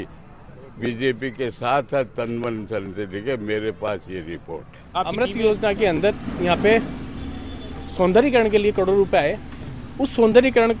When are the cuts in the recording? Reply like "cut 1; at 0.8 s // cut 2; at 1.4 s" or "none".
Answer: cut 1; at 5.1 s